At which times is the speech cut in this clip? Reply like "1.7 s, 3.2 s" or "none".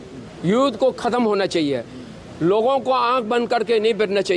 none